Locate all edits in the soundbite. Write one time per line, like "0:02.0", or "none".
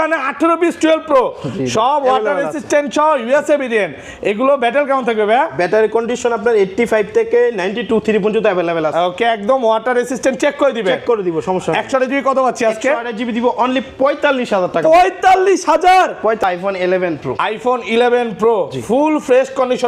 0:16.4